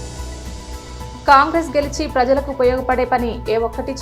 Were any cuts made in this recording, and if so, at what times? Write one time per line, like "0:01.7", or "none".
0:01.2